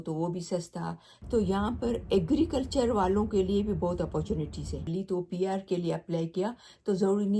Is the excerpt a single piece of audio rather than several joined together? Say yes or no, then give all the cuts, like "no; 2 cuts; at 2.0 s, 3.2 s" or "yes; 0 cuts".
no; 2 cuts; at 1.1 s, 4.9 s